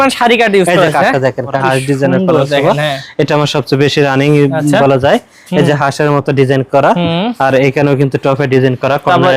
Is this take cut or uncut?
cut